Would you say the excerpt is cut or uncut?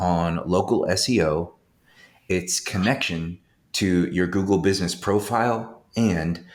uncut